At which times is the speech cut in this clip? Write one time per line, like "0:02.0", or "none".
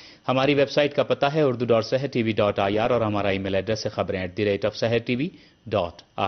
0:03.3